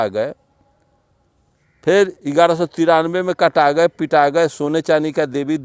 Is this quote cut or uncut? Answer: uncut